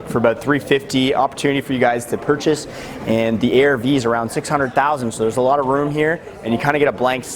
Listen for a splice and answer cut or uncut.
uncut